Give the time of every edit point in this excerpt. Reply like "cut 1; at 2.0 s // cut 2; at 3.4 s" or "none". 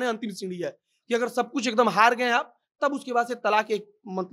none